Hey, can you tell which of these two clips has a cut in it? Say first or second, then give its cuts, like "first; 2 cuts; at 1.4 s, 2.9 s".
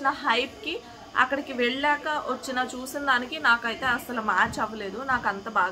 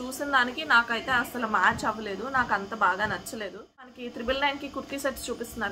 second; 1 cut; at 4.0 s